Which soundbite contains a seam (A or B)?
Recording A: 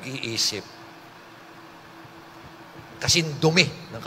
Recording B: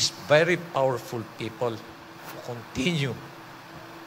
A